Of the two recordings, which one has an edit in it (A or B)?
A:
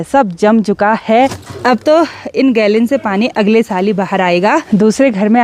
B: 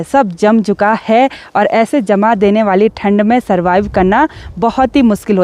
A